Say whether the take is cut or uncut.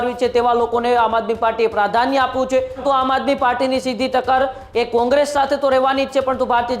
cut